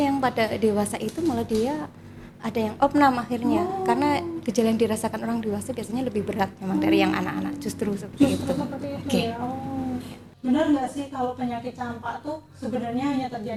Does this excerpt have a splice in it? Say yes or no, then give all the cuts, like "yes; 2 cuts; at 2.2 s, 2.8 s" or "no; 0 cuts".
no; 0 cuts